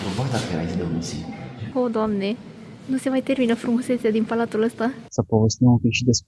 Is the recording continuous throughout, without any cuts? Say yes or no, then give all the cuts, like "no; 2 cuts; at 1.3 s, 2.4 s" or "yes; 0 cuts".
no; 2 cuts; at 1.6 s, 5.0 s